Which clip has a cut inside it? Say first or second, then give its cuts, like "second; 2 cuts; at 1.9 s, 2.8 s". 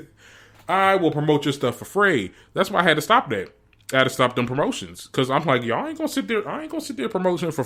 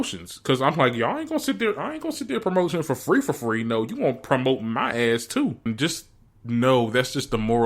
second; 1 cut; at 5.7 s